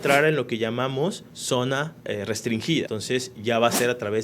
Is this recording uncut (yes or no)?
no